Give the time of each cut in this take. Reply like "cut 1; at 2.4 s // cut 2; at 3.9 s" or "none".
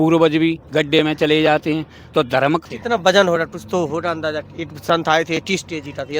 cut 1; at 2.6 s